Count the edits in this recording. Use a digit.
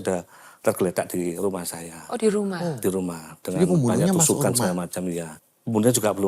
1